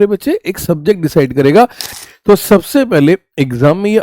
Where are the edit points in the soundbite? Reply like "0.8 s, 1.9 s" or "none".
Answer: 1.8 s